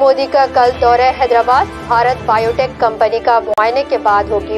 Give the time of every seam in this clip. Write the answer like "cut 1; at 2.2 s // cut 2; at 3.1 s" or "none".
cut 1; at 1.2 s